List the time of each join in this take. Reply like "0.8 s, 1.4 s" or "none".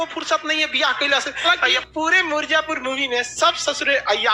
1.4 s